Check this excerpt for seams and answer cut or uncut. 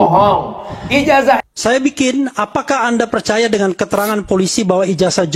cut